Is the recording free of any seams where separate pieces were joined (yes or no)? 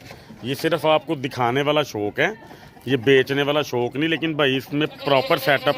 yes